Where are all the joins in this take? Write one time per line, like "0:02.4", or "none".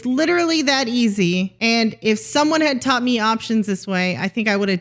0:01.5